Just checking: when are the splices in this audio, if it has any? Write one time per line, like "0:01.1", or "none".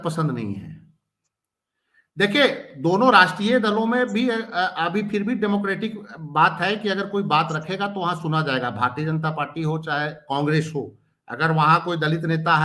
none